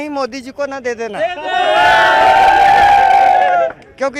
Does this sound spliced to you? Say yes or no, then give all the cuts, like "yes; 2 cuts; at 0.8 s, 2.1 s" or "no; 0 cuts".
no; 0 cuts